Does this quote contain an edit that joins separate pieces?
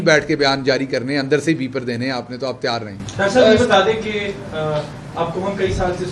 no; 0 cuts

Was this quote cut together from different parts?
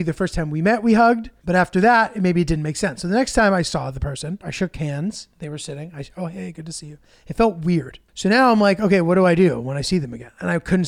yes; 3 cuts; at 1.3 s, 4.5 s, 8.0 s

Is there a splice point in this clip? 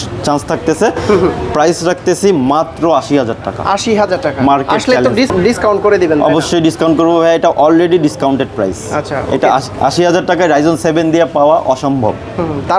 no; 0 cuts

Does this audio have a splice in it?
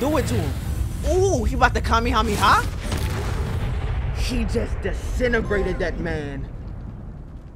no; 0 cuts

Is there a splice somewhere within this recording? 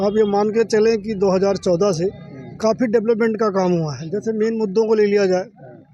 no; 0 cuts

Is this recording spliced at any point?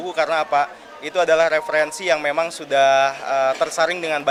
no; 0 cuts

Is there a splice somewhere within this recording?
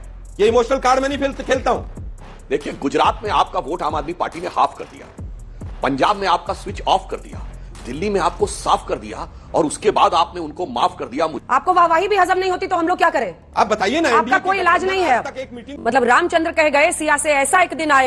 yes; 3 cuts; at 2.0 s, 11.4 s, 15.7 s

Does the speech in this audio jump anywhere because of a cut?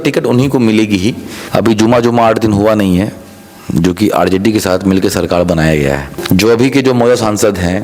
yes; 2 cuts; at 1.3 s, 6.1 s

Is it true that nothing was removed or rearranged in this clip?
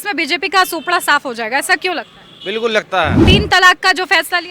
no; 1 cut; at 3.2 s

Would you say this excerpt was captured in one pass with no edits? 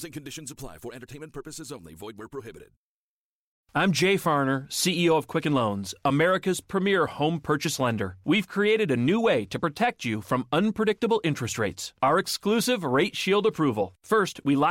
no; 1 cut; at 3.6 s

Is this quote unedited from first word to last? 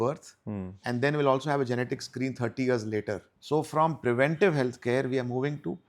no; 1 cut; at 3.3 s

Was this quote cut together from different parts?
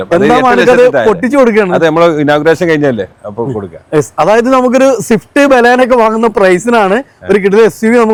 no; 0 cuts

